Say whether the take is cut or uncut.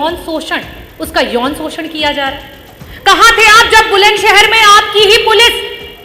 uncut